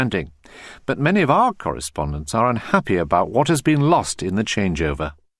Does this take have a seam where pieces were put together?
no; 0 cuts

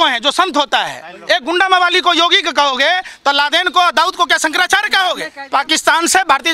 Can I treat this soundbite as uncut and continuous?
no; 1 cut; at 5.3 s

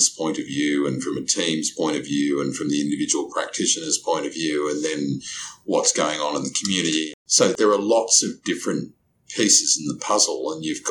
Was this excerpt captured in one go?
no; 1 cut; at 7.5 s

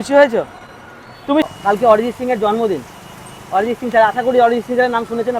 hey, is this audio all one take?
no; 1 cut; at 1.4 s

